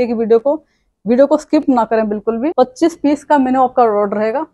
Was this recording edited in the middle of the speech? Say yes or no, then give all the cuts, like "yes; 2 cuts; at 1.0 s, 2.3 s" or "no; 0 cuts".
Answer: yes; 1 cut; at 2.5 s